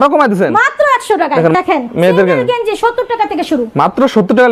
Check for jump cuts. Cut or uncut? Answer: cut